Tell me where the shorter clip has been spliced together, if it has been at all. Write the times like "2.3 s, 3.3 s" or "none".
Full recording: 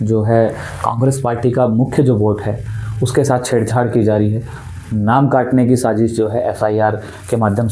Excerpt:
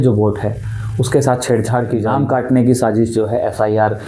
2.1 s